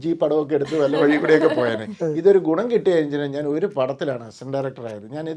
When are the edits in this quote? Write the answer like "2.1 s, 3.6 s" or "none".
none

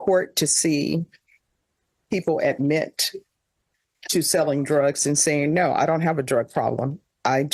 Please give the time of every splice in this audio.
none

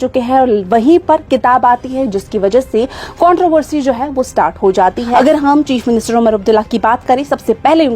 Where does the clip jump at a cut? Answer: 5.0 s

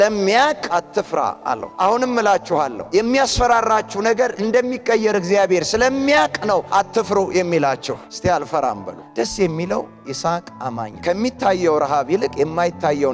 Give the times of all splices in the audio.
2.8 s, 9.0 s, 10.9 s

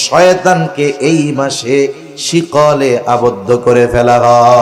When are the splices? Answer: none

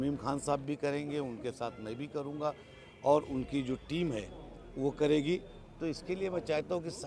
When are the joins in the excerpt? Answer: none

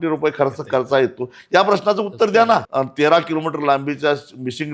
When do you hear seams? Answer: 2.7 s

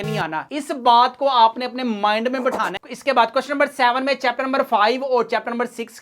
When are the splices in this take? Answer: 2.8 s

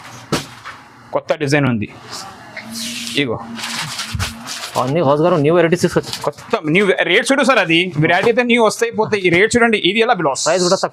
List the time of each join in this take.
none

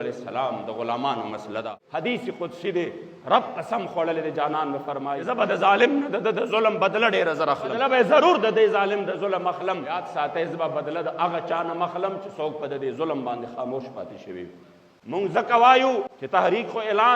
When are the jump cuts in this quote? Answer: 1.8 s, 5.1 s, 7.8 s, 10.0 s, 15.0 s

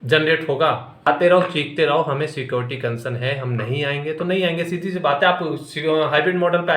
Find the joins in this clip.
1.1 s

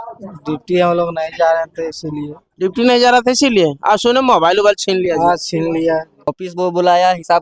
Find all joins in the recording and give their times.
6.3 s

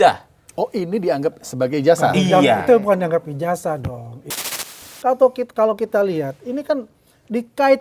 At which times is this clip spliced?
4.4 s

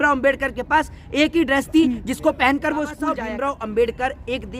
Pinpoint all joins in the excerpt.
3.1 s

